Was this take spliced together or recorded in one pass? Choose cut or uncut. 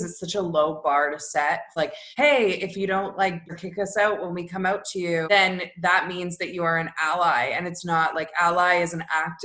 cut